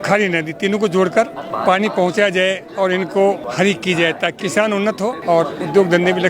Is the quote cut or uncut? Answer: cut